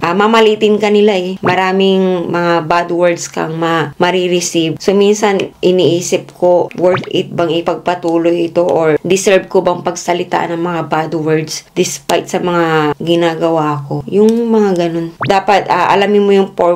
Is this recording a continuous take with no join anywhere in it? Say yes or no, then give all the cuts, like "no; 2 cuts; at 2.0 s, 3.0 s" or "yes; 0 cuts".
yes; 0 cuts